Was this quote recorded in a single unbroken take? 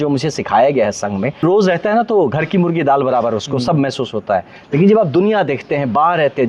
no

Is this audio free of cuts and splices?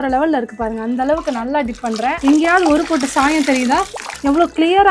no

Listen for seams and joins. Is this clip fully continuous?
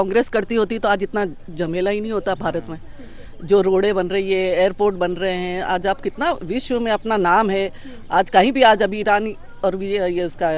yes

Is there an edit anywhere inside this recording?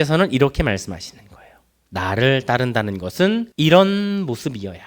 yes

